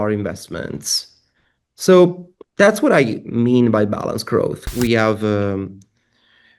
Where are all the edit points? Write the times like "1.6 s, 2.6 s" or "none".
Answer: 4.6 s